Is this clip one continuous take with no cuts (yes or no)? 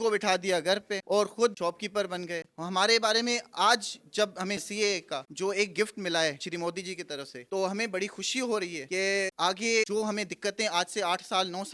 yes